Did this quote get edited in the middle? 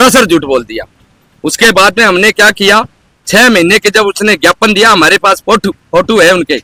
no; 0 cuts

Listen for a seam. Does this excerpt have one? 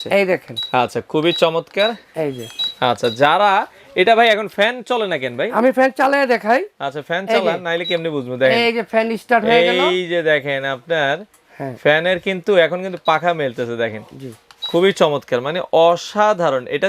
no; 0 cuts

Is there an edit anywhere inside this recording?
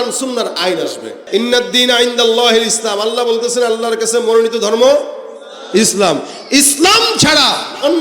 yes; 1 cut; at 1.1 s

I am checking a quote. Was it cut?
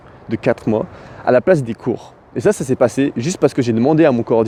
no; 0 cuts

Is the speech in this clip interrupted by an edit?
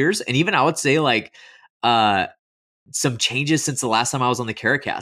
no; 0 cuts

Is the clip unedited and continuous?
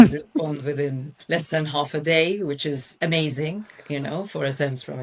no; 1 cut; at 1.1 s

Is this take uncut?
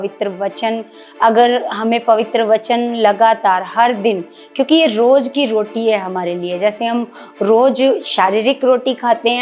yes; 0 cuts

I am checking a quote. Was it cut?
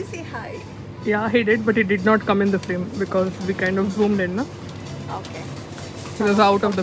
no; 0 cuts

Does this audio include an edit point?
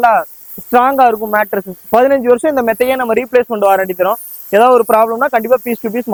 no; 0 cuts

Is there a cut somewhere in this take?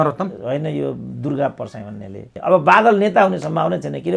yes; 1 cut; at 2.2 s

